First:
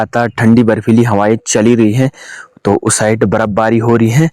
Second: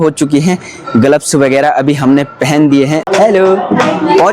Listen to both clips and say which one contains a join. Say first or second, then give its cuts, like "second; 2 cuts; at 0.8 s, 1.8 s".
second; 1 cut; at 3.1 s